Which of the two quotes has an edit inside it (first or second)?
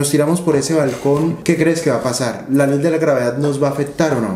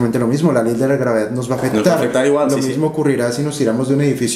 first